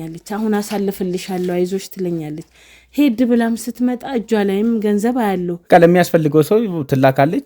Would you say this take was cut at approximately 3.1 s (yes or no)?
no